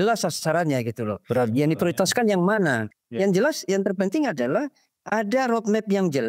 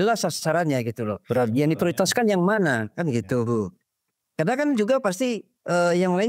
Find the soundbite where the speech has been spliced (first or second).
first